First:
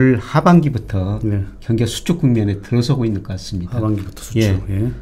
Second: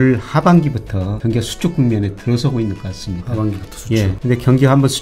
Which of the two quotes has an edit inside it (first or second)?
second